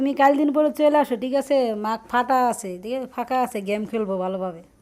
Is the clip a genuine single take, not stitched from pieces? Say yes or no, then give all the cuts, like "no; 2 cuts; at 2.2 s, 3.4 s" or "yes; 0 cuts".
yes; 0 cuts